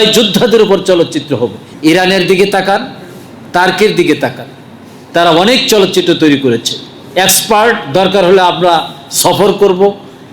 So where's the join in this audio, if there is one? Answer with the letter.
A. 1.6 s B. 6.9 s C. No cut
A